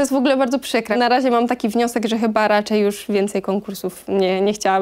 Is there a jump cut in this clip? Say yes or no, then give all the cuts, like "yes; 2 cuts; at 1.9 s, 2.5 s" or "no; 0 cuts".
yes; 1 cut; at 0.9 s